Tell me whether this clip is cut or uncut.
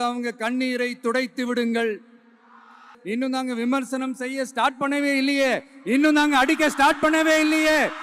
cut